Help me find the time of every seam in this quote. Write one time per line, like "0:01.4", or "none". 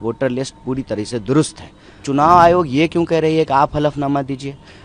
0:02.0